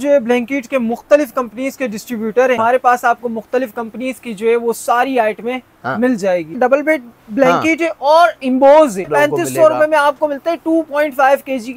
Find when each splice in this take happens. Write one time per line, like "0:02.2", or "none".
0:02.6
0:06.5
0:09.1